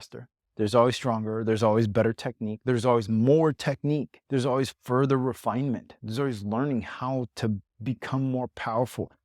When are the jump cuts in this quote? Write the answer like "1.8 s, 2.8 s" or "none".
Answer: 4.2 s, 6.0 s